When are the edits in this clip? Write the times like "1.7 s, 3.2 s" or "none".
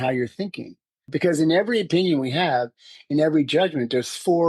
1.0 s